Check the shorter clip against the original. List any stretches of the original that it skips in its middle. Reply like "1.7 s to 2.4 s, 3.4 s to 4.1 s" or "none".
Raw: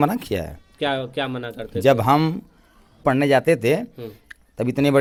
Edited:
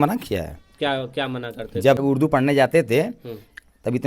2.0 s to 2.7 s